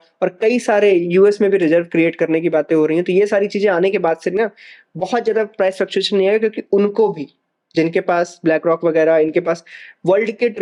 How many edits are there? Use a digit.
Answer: 0